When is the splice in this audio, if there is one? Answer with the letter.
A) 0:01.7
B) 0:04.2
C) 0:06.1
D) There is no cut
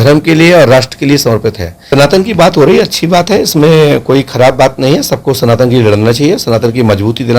A